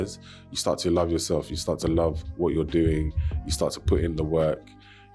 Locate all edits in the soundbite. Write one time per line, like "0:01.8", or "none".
none